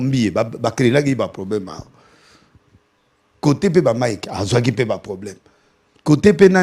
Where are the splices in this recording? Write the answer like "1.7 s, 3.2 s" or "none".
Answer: none

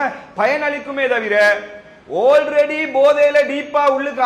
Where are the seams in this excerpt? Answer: none

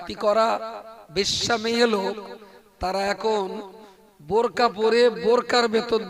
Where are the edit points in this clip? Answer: none

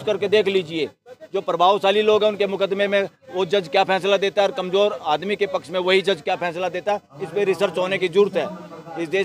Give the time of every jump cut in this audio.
none

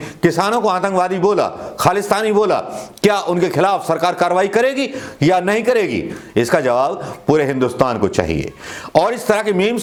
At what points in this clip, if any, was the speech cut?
none

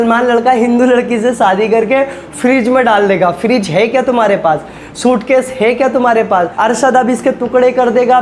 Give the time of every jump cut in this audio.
6.5 s

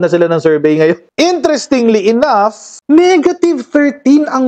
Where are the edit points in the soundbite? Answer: 1.1 s, 2.8 s

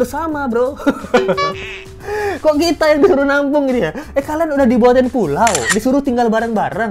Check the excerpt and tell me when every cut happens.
none

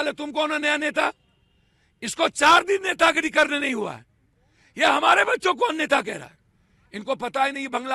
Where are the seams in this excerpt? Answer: none

